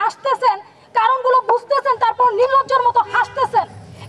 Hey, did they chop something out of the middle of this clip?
no; 0 cuts

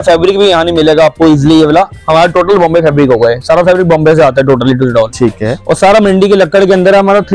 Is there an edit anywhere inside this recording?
no; 0 cuts

